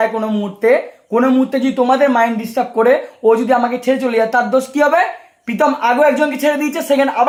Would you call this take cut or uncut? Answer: uncut